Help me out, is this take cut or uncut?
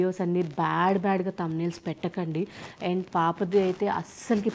uncut